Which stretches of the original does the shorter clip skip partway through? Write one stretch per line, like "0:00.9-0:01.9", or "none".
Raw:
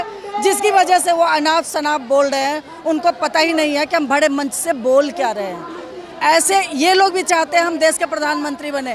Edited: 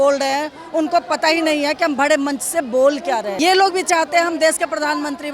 0:05.5-0:06.7